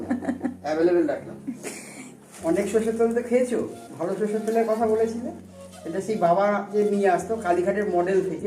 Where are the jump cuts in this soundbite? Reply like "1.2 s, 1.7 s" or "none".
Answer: 2.3 s